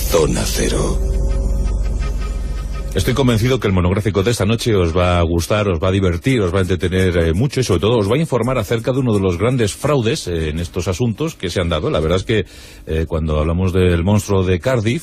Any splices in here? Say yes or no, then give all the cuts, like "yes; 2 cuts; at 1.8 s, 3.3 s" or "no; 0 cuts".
no; 0 cuts